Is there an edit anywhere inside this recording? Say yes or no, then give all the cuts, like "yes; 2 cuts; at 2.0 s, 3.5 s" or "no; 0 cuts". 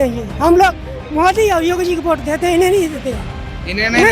no; 0 cuts